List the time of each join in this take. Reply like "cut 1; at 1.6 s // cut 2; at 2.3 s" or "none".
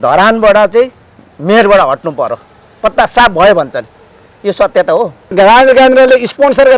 cut 1; at 5.3 s